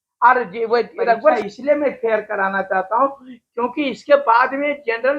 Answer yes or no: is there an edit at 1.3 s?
yes